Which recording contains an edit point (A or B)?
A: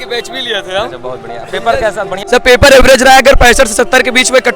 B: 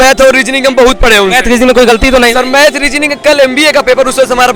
A